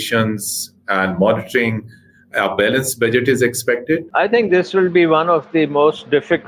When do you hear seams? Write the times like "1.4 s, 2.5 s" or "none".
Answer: 4.1 s

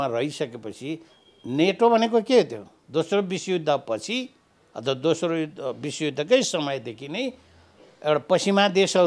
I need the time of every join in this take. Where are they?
none

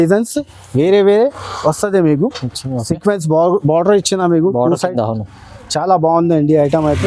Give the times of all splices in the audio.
none

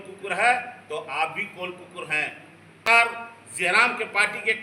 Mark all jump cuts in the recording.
2.9 s

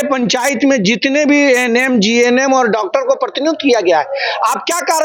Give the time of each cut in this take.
none

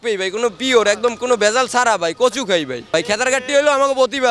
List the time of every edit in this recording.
2.8 s

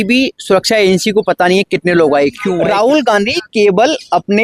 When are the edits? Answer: 2.5 s

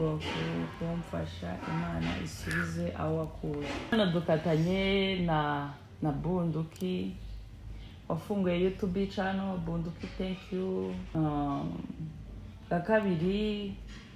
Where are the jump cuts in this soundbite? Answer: 3.9 s, 11.1 s

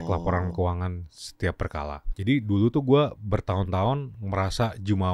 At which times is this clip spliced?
2.1 s

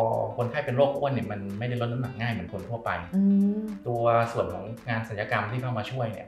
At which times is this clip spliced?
none

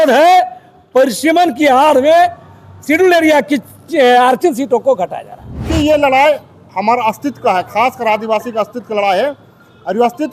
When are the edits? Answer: 5.7 s

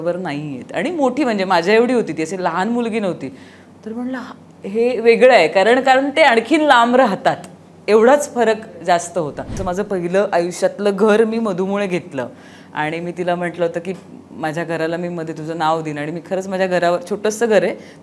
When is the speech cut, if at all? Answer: 9.6 s

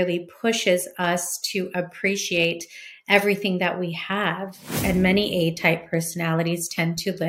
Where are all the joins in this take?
4.8 s

